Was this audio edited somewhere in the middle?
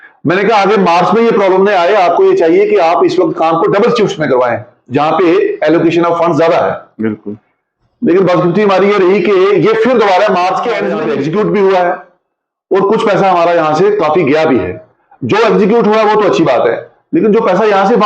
yes; 1 cut; at 10.9 s

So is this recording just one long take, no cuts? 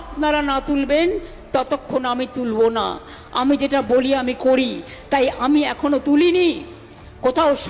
yes; 0 cuts

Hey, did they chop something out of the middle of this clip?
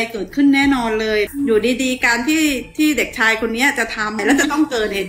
yes; 2 cuts; at 1.3 s, 4.2 s

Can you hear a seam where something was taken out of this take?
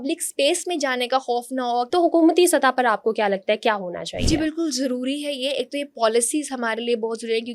yes; 1 cut; at 1.9 s

